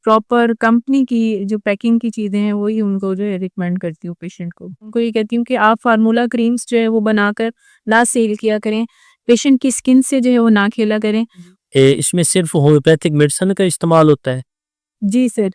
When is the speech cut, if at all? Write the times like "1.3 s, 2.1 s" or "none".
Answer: 4.9 s, 11.5 s